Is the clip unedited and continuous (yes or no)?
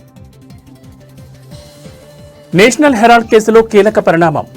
no